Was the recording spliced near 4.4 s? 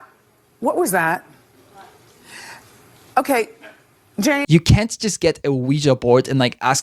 yes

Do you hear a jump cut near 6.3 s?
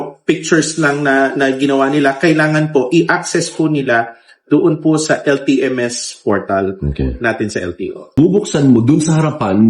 no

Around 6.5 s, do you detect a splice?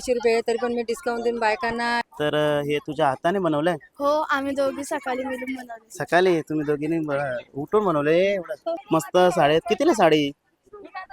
no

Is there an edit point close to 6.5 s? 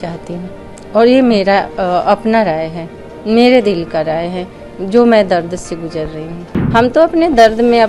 yes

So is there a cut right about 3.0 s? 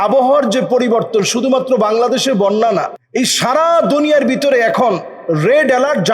yes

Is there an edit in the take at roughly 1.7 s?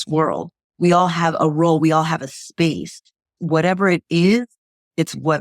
no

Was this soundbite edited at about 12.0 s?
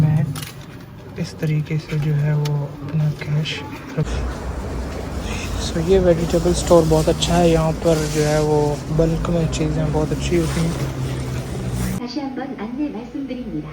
yes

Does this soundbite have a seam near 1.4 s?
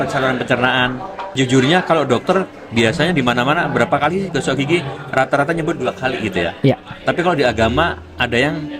yes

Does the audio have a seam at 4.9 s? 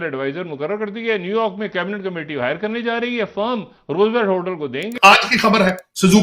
yes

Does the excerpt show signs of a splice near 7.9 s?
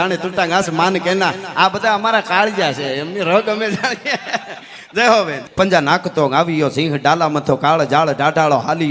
no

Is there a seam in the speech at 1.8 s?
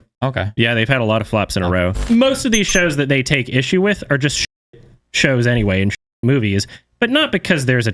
yes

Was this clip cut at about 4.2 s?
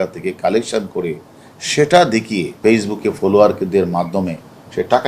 no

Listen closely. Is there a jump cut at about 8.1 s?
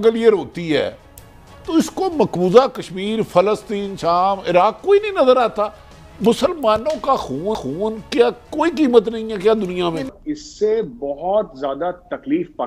no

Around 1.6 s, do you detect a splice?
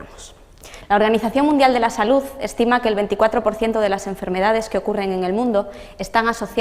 no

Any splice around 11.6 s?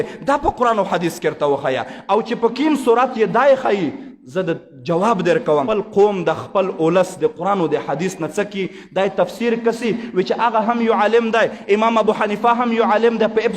no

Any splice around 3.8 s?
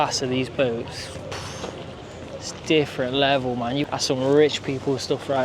yes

